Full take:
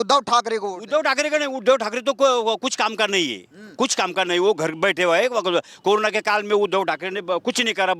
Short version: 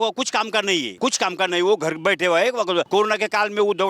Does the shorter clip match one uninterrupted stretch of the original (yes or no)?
no